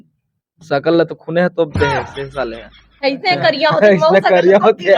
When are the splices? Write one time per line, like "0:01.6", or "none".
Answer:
none